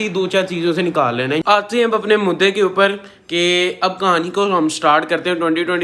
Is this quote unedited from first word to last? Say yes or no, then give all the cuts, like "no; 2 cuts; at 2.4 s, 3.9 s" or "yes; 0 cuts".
no; 1 cut; at 1.4 s